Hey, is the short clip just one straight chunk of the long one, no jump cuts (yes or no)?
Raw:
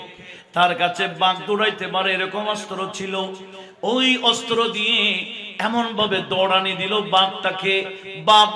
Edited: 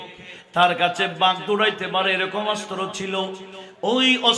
yes